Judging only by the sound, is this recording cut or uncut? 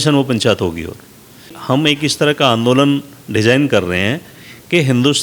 cut